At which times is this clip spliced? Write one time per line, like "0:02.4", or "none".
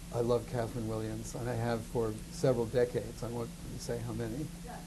0:01.1